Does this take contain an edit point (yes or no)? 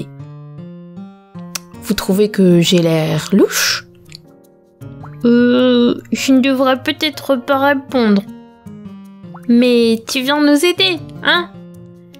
no